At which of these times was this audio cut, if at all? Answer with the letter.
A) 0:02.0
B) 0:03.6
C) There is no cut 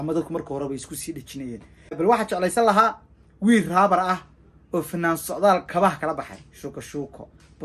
A